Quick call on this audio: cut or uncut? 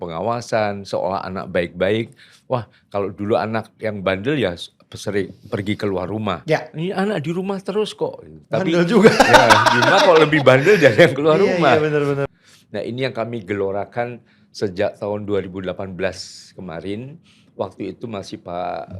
cut